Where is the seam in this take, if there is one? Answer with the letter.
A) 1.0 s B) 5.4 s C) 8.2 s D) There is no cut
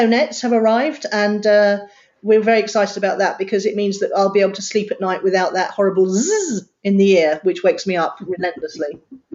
D